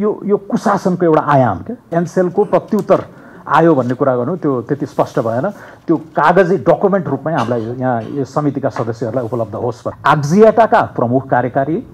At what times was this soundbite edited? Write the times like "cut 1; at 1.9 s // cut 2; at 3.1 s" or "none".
cut 1; at 1.9 s // cut 2; at 9.9 s